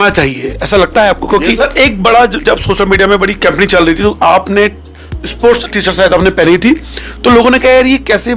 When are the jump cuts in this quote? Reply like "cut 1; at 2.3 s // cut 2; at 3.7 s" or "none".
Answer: cut 1; at 1.6 s

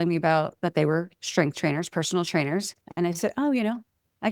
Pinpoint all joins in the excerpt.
cut 1; at 2.8 s

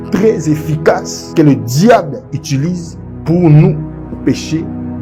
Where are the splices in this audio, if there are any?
none

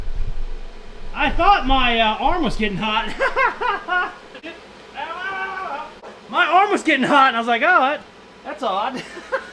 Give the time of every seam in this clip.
cut 1; at 4.5 s // cut 2; at 6.2 s

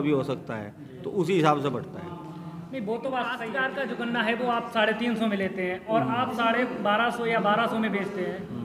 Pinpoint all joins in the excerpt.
cut 1; at 3.6 s

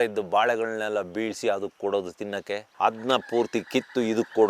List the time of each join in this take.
cut 1; at 2.7 s

